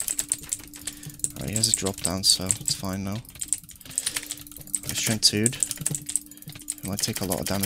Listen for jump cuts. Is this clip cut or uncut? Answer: uncut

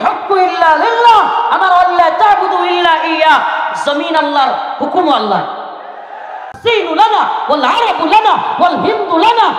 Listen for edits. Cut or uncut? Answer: cut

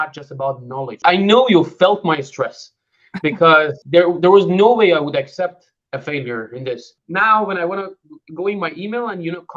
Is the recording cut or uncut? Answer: cut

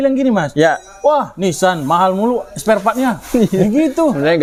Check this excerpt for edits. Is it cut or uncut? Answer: uncut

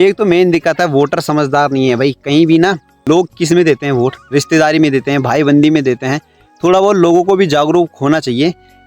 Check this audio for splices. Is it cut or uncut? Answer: cut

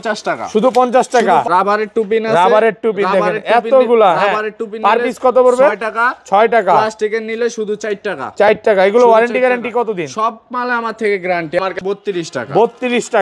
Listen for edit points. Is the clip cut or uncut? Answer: cut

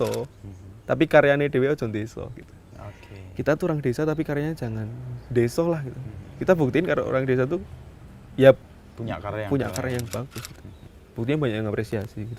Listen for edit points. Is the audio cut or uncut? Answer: uncut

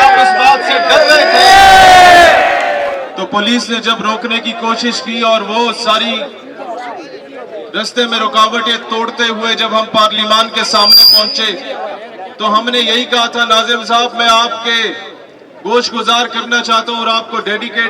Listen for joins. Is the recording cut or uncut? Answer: cut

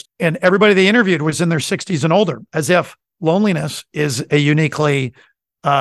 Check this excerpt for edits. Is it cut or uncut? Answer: cut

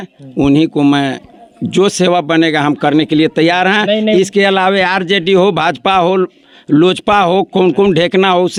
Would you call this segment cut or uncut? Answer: uncut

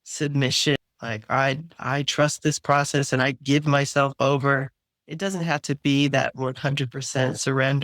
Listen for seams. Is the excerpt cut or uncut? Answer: cut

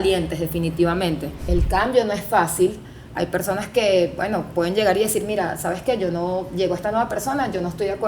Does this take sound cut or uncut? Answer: cut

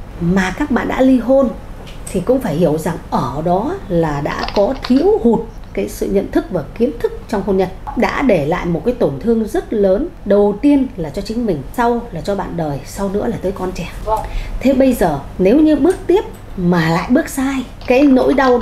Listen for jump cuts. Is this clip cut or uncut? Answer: cut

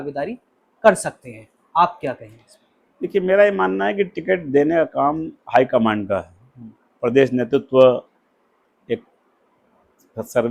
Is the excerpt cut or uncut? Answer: uncut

